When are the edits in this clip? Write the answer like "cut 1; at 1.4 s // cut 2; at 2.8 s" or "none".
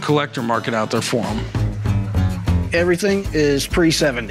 none